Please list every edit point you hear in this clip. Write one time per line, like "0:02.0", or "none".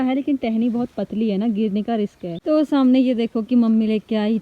0:02.3